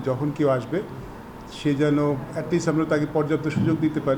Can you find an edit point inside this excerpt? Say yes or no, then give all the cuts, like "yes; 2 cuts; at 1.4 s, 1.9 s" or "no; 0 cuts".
no; 0 cuts